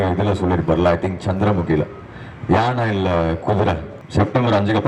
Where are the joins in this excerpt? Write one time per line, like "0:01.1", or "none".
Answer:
0:03.9